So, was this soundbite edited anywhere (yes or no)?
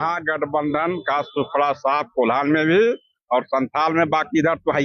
no